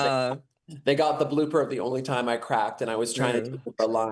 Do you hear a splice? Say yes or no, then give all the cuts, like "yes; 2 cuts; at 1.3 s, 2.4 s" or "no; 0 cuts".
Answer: no; 0 cuts